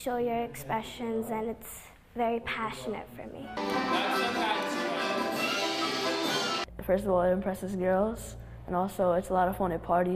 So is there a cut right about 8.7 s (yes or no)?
no